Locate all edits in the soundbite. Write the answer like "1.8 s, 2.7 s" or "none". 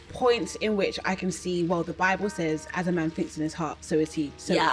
none